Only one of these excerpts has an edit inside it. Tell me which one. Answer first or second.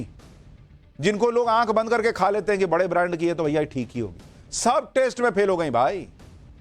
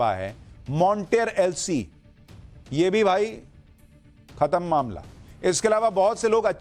first